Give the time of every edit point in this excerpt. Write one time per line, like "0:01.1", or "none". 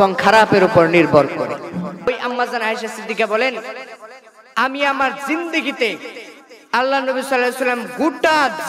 0:02.1

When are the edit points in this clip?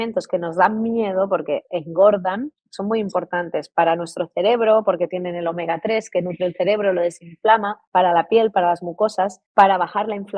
0:07.8
0:09.4

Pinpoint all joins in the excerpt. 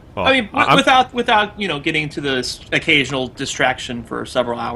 0:02.0

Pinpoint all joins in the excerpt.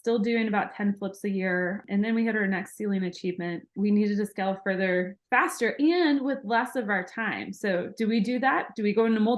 0:01.8
0:03.7

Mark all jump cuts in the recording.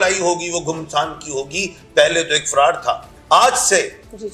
0:03.1

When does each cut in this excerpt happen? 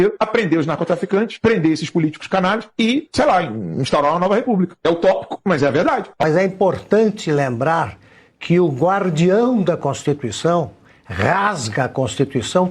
0:06.2

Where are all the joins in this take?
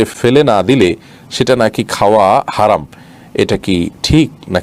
none

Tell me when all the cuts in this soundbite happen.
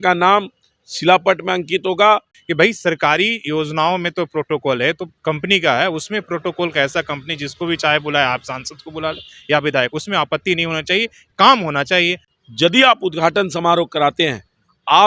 0:02.4
0:05.1
0:12.2

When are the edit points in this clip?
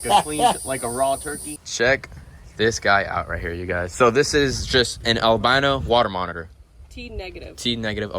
0:01.5

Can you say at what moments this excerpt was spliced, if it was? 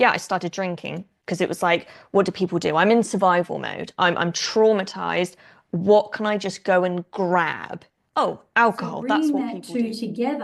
0:09.0

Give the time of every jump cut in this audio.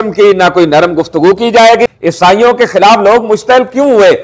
0:01.9

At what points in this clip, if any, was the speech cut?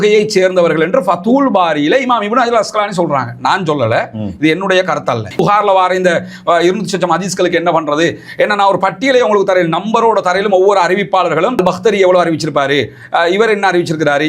0:05.4

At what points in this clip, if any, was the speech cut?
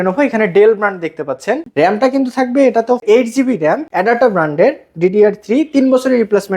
0:01.7
0:03.0
0:03.9

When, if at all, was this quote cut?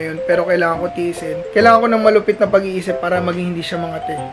0:01.0

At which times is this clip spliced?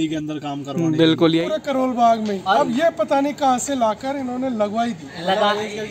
0:01.4

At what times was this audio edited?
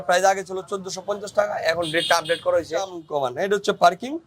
0:03.0

